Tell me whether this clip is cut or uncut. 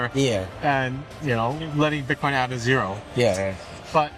uncut